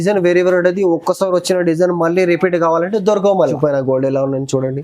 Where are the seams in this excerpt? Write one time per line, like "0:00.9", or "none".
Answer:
0:03.4